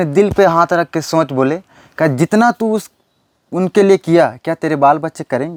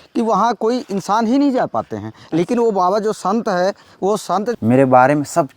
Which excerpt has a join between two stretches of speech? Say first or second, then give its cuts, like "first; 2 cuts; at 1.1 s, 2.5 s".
second; 1 cut; at 4.6 s